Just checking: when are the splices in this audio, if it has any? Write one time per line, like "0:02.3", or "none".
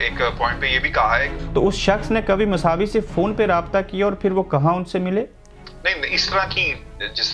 0:01.4